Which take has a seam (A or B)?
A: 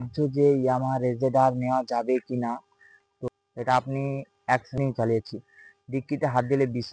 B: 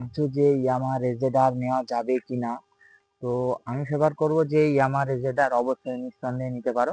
A